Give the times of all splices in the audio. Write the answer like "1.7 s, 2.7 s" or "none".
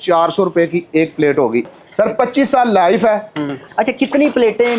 1.7 s, 3.6 s